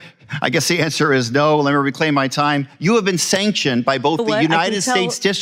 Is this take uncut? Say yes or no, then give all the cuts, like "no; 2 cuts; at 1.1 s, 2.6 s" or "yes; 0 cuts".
yes; 0 cuts